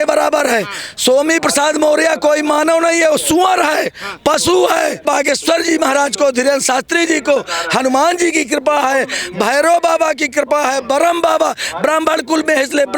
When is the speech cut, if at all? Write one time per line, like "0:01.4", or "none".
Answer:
0:05.0